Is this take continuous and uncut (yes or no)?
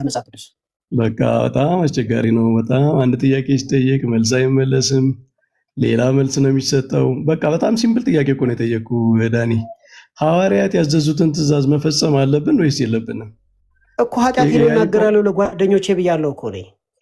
yes